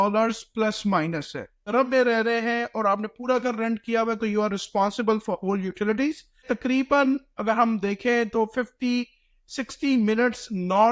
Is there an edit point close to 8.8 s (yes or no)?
no